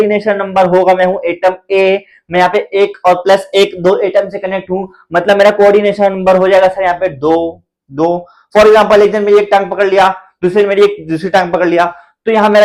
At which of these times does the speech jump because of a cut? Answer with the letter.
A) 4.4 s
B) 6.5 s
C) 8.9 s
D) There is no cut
D